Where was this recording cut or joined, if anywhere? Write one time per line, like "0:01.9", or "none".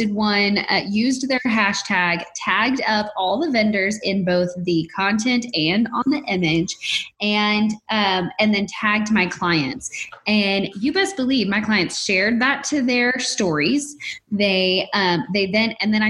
none